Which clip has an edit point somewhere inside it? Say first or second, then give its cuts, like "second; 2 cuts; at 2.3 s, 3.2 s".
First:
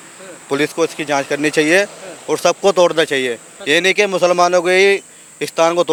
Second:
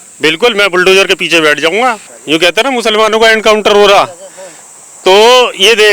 second; 1 cut; at 2.1 s